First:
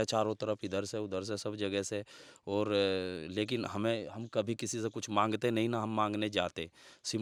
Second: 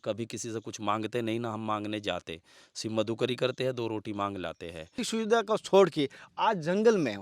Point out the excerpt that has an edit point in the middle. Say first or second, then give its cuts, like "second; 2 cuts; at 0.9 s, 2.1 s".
second; 1 cut; at 5.0 s